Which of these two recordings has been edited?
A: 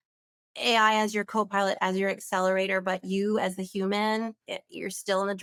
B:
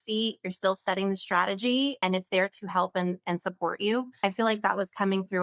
B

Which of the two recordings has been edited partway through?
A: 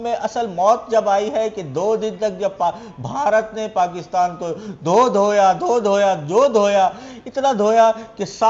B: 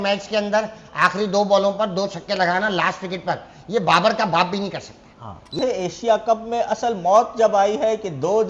B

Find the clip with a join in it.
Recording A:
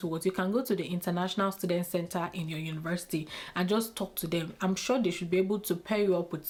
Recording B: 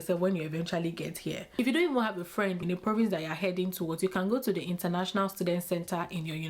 B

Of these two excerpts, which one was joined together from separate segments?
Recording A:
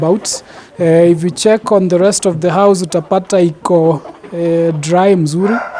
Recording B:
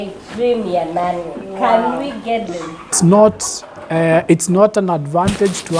B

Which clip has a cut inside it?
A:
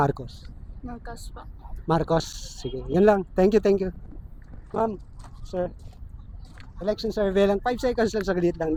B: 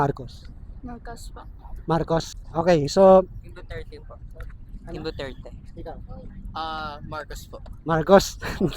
B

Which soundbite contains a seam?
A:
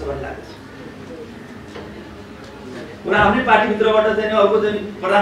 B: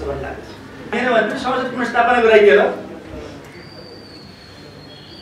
B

